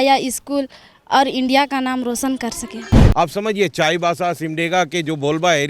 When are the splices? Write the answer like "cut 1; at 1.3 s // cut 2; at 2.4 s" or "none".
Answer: cut 1; at 3.0 s